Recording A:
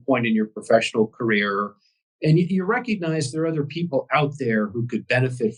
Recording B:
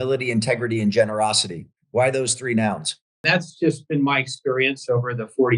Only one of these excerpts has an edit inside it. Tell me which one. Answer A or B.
B